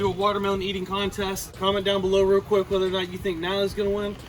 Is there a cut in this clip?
yes; 1 cut; at 1.5 s

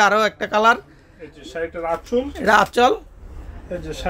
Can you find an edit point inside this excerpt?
no; 0 cuts

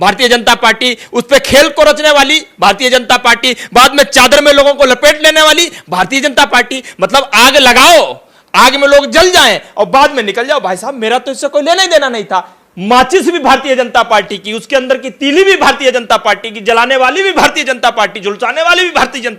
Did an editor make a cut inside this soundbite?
no; 0 cuts

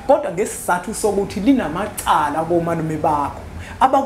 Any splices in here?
no; 0 cuts

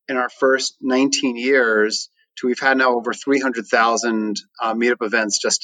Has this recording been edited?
no; 0 cuts

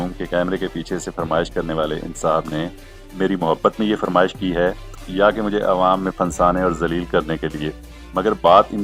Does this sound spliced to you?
no; 0 cuts

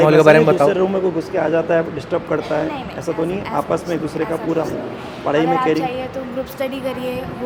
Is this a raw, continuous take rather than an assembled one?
yes; 0 cuts

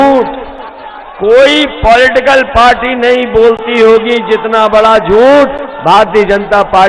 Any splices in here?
no; 0 cuts

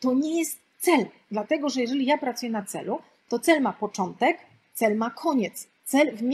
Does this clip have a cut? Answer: no; 0 cuts

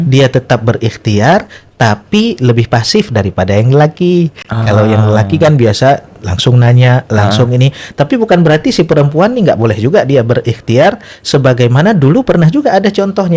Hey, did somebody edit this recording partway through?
no; 0 cuts

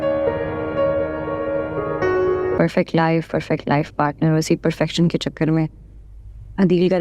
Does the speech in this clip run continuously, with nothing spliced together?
no; 1 cut; at 2.6 s

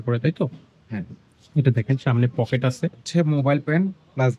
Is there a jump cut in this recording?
yes; 1 cut; at 3.0 s

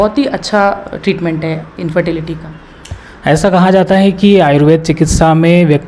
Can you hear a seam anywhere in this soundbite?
no; 0 cuts

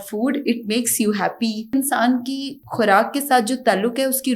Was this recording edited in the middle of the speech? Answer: yes; 2 cuts; at 1.7 s, 2.5 s

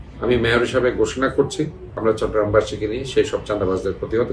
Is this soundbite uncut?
no; 1 cut; at 1.8 s

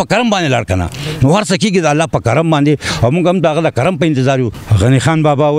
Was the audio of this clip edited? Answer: yes; 1 cut; at 4.6 s

